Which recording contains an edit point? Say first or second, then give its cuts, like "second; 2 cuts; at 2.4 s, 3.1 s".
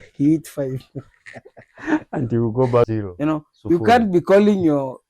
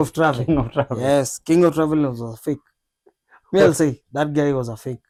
first; 1 cut; at 3.0 s